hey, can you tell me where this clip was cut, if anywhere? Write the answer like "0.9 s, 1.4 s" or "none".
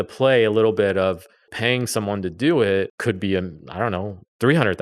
1.5 s, 3.0 s